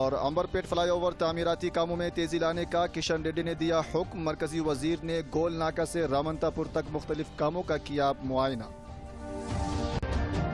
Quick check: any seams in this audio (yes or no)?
yes